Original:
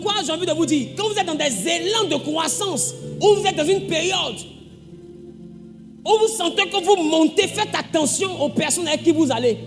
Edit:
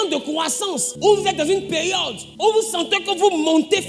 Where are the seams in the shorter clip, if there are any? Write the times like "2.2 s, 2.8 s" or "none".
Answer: 0.9 s, 2.2 s